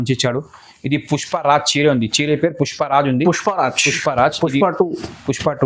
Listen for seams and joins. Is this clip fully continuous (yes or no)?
yes